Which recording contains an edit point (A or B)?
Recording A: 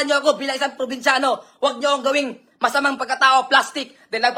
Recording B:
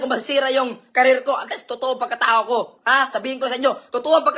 B